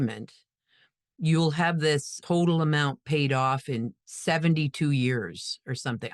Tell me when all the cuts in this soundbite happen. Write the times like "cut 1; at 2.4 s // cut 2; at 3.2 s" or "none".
cut 1; at 2.1 s